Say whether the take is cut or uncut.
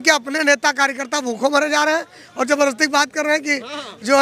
uncut